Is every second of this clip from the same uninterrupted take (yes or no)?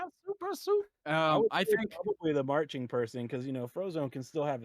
no